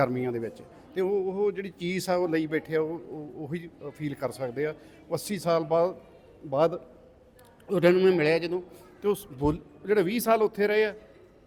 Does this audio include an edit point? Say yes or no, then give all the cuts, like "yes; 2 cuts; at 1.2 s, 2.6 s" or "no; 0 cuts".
no; 0 cuts